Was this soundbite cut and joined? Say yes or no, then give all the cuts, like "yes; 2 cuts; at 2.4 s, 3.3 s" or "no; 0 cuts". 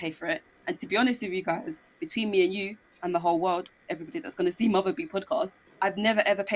yes; 1 cut; at 5.6 s